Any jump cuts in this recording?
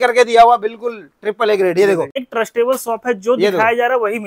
yes; 1 cut; at 2.2 s

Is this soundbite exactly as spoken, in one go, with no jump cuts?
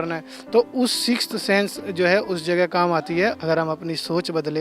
no; 1 cut; at 3.3 s

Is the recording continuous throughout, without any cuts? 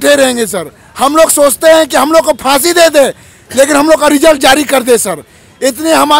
yes; 0 cuts

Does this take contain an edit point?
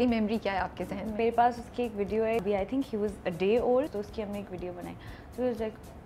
yes; 3 cuts; at 1.2 s, 2.4 s, 4.0 s

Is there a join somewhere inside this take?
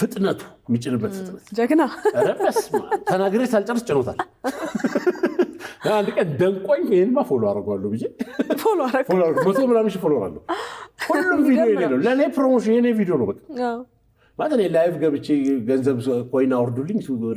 no; 0 cuts

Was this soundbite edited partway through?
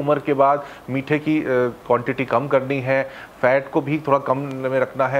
no; 0 cuts

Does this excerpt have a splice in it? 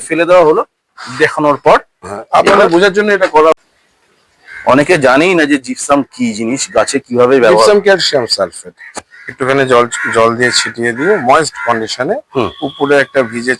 yes; 2 cuts; at 3.5 s, 8.9 s

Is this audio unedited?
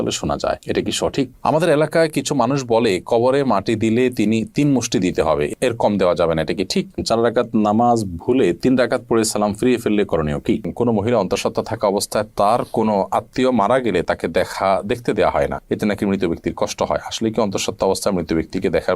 no; 3 cuts; at 1.3 s, 7.0 s, 10.7 s

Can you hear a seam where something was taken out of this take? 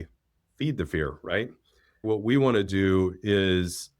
yes; 1 cut; at 2.0 s

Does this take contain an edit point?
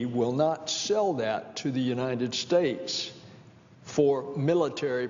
no; 0 cuts

